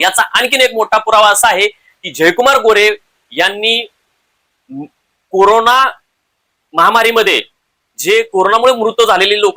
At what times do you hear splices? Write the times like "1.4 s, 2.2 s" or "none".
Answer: none